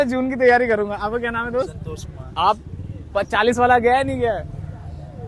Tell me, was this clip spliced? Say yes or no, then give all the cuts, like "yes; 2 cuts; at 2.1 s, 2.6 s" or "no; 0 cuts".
no; 0 cuts